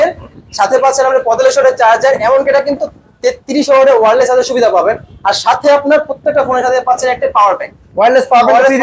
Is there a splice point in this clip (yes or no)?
no